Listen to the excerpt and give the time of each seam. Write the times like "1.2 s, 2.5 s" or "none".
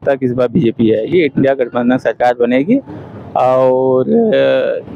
none